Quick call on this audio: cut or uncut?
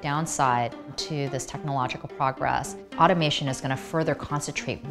cut